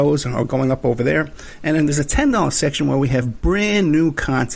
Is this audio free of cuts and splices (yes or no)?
yes